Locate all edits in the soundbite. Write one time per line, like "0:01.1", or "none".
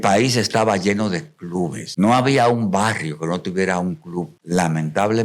0:01.8
0:04.4